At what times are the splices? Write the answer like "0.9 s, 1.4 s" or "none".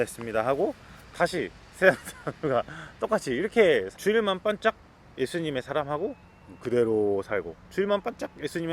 3.9 s